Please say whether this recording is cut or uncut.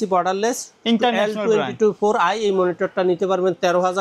uncut